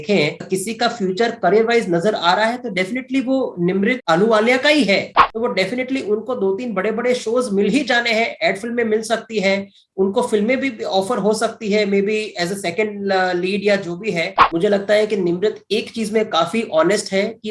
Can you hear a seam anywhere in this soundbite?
yes; 2 cuts; at 5.2 s, 14.3 s

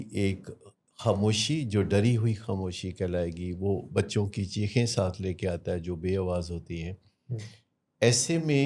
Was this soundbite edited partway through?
no; 0 cuts

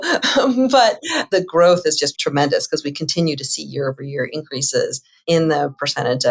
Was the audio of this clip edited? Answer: yes; 3 cuts; at 1.1 s, 2.1 s, 5.1 s

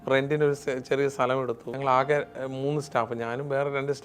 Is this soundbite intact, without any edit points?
no; 1 cut; at 1.7 s

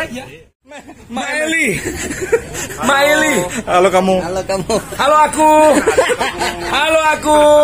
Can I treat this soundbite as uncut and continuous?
no; 1 cut; at 1.0 s

